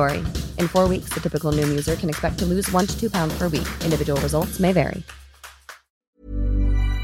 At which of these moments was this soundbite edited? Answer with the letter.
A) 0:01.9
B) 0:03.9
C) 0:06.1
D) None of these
C